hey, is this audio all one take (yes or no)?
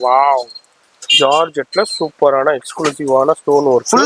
yes